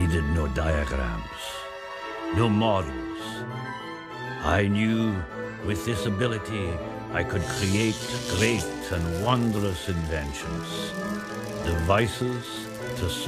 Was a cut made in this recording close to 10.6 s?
yes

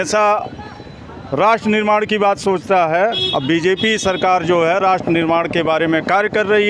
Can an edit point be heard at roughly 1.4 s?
no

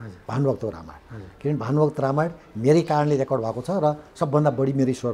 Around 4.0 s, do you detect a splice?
no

